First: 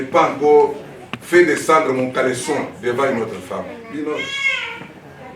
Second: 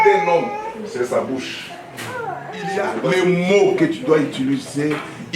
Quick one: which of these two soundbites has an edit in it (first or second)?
second